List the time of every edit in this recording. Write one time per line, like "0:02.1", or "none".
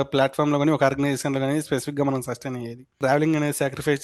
0:02.9